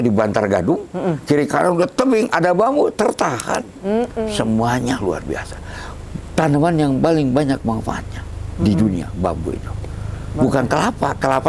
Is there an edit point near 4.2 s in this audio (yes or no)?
yes